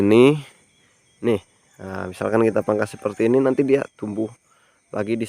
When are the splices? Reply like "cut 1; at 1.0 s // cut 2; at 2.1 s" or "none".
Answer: none